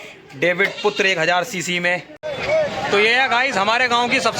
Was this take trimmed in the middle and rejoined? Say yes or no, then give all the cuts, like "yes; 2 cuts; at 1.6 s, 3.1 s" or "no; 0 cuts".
yes; 1 cut; at 2.3 s